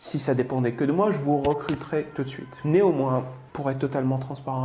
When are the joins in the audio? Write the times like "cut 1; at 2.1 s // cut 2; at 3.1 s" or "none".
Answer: cut 1; at 2.5 s // cut 2; at 3.4 s